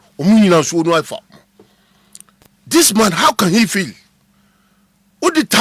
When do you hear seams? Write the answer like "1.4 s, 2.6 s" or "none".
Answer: none

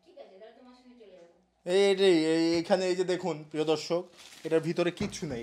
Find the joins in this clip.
none

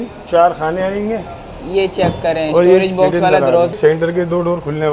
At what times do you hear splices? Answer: 3.8 s

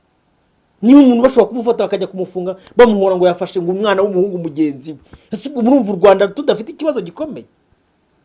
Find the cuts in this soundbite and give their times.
none

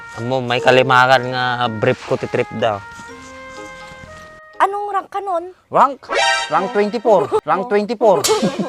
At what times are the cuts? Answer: 4.4 s

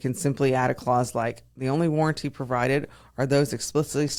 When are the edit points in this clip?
none

